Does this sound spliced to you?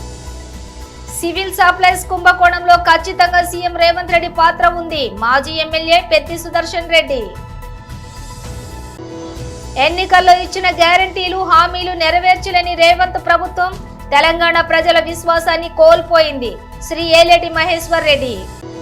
yes; 1 cut; at 1.0 s

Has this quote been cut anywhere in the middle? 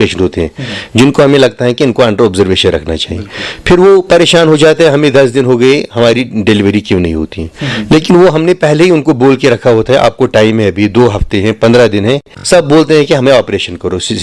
yes; 1 cut; at 12.3 s

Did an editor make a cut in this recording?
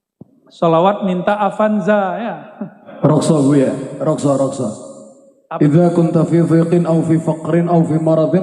yes; 1 cut; at 2.9 s

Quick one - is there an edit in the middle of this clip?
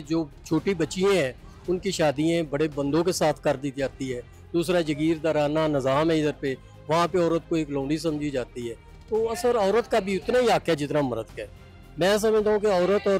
no; 0 cuts

